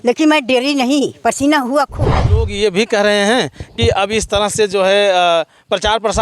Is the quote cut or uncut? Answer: cut